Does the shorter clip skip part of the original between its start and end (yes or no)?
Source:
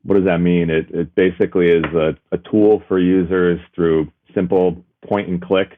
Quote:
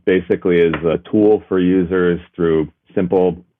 yes